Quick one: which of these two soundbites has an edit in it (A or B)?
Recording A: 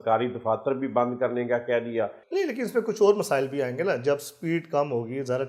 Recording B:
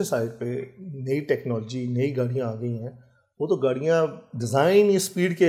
A